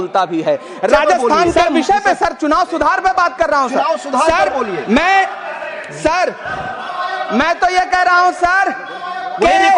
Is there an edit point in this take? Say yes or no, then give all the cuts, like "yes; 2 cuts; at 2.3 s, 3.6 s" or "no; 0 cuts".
yes; 1 cut; at 1.7 s